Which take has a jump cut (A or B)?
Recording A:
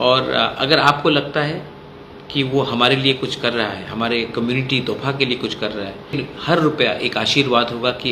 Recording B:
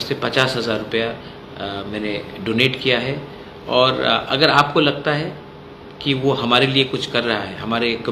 A